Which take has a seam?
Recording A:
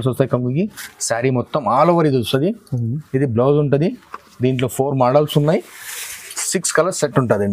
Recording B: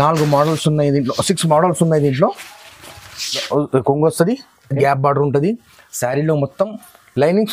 B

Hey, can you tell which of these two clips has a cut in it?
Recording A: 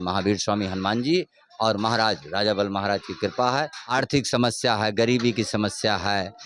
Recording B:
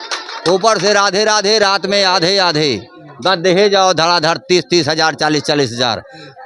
A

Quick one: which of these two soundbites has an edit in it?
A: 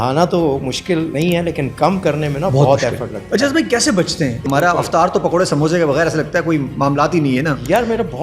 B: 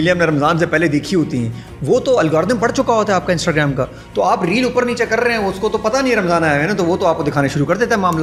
A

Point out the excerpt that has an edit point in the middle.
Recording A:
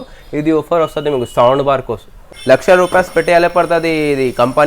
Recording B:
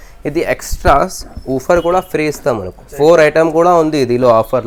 A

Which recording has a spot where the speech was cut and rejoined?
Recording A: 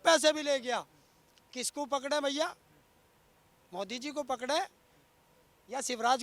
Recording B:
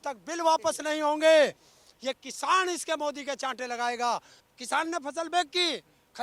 B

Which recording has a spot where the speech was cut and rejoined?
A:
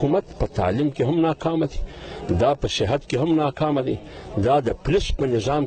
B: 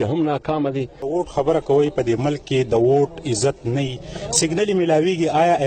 B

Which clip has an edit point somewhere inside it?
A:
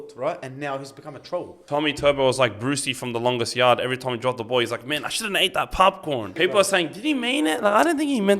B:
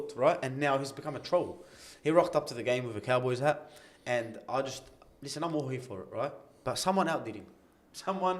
A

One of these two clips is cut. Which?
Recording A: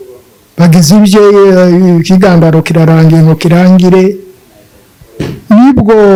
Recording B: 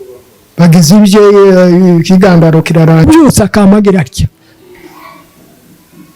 B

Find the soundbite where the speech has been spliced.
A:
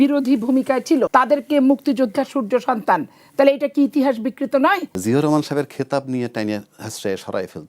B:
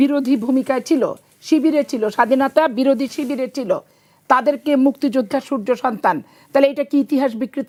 A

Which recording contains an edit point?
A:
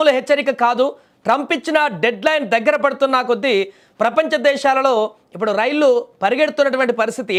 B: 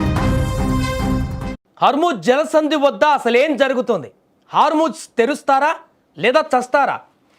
B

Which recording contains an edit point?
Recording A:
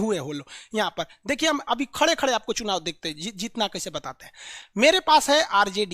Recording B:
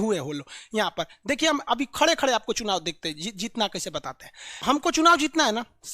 B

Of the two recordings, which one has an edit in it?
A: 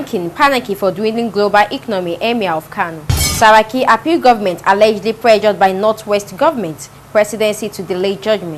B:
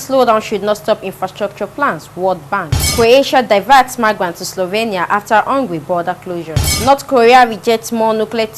B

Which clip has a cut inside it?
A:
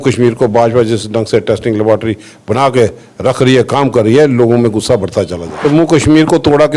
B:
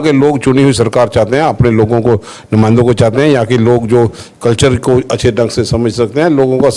A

